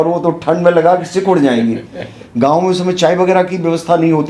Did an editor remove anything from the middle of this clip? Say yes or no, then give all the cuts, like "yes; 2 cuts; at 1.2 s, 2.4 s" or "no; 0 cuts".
no; 0 cuts